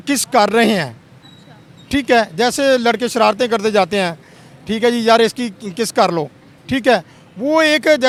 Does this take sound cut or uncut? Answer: uncut